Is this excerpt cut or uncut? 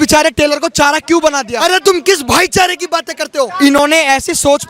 cut